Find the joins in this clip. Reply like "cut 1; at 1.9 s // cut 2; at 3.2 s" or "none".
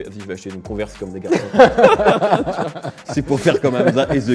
none

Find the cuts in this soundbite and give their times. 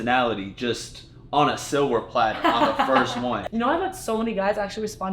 cut 1; at 3.4 s

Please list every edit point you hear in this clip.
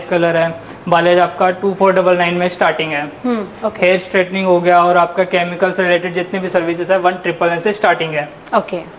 none

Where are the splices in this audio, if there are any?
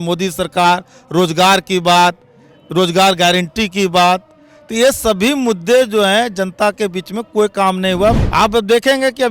cut 1; at 8.2 s

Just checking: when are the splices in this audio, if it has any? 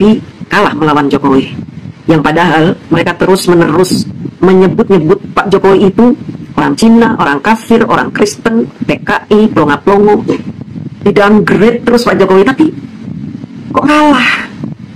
none

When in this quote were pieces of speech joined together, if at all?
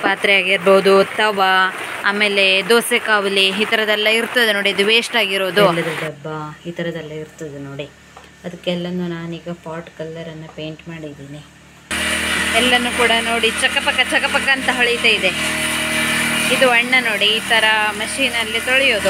cut 1; at 5.7 s // cut 2; at 11.9 s

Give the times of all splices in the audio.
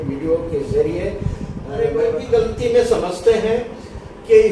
cut 1; at 1.6 s

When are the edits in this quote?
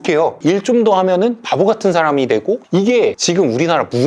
none

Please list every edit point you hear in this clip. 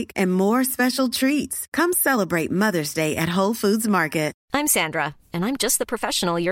cut 1; at 4.4 s

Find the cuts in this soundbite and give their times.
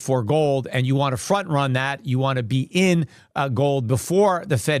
none

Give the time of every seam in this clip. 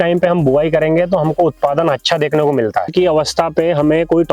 cut 1; at 2.9 s

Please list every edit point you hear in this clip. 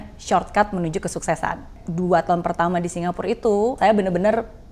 cut 1; at 1.7 s // cut 2; at 3.8 s

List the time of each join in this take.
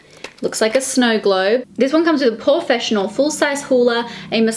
cut 1; at 1.7 s

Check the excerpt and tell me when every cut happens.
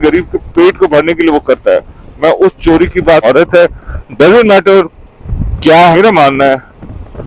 cut 1; at 3.2 s // cut 2; at 5.9 s

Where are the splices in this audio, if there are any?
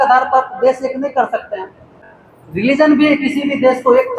cut 1; at 2.1 s

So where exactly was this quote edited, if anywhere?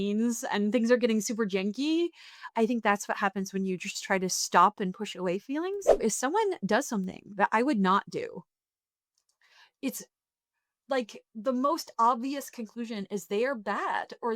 cut 1; at 6.0 s

